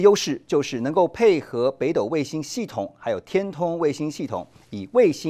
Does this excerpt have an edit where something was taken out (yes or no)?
no